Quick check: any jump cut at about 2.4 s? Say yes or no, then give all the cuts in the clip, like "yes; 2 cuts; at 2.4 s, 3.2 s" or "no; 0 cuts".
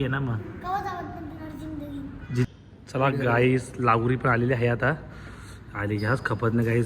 yes; 1 cut; at 2.4 s